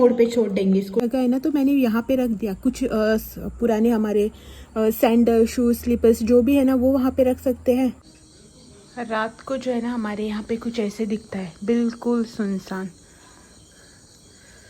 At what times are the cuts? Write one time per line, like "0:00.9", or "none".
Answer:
0:01.0
0:08.0